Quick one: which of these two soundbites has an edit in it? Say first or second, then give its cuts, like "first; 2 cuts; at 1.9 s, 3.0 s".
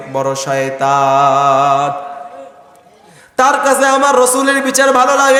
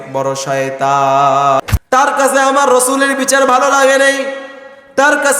second; 1 cut; at 1.6 s